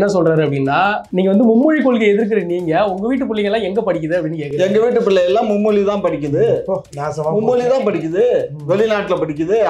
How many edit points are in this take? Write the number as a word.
two